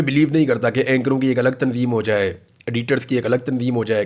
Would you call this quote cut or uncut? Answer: uncut